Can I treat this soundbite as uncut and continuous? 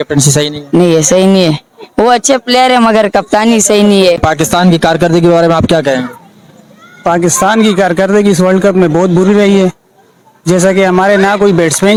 yes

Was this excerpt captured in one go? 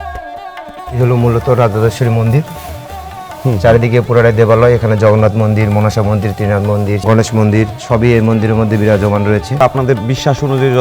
no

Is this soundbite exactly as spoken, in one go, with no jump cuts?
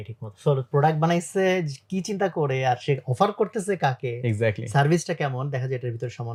yes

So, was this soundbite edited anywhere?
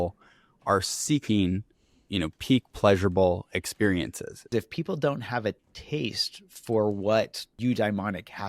yes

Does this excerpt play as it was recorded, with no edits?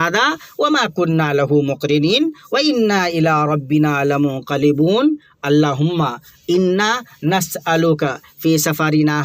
yes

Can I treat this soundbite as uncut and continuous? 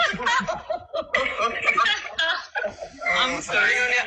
yes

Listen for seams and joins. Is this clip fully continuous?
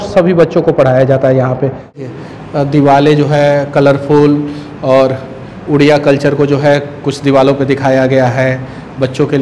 no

